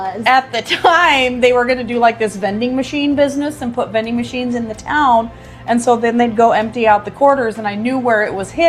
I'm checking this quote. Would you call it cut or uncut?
uncut